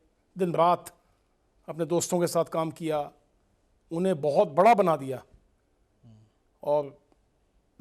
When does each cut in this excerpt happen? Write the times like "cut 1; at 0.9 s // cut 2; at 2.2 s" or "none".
none